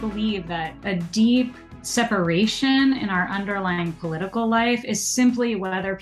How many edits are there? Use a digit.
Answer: 2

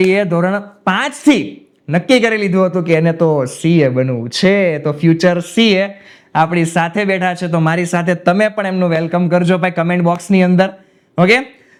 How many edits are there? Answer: 0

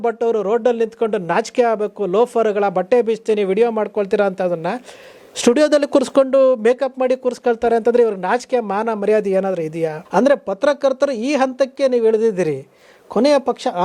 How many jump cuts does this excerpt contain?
1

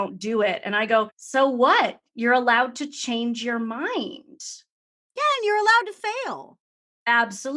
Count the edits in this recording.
1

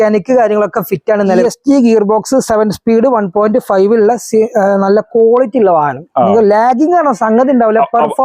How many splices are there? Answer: 1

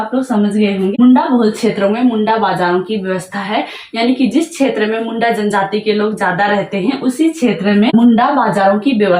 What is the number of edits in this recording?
2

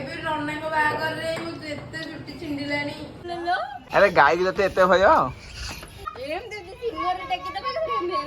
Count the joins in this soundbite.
1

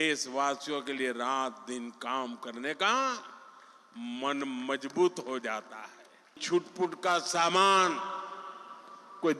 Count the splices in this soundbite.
1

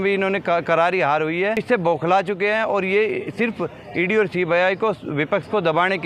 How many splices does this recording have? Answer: 1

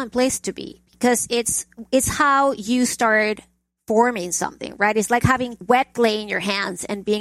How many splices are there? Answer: 1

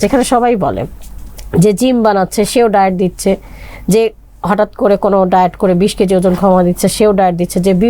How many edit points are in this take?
0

